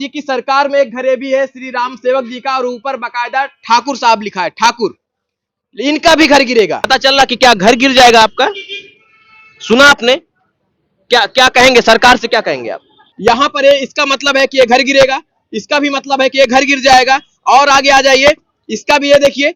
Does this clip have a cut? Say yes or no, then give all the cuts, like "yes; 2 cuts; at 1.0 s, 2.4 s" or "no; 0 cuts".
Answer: yes; 2 cuts; at 6.8 s, 13.0 s